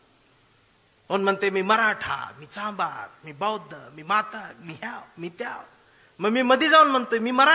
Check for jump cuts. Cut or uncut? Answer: uncut